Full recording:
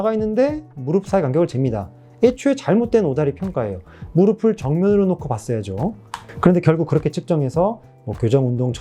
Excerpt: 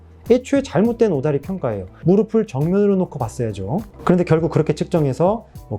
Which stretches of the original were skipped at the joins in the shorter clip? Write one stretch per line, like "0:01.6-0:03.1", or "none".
0:03.8-0:04.0
0:06.0-0:06.2